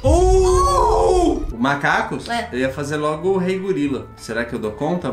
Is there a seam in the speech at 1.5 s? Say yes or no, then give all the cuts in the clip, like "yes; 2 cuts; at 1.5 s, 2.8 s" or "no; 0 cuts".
yes; 2 cuts; at 1.5 s, 4.2 s